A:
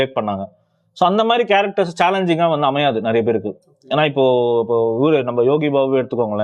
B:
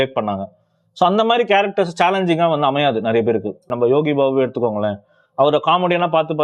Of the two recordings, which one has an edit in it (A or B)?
B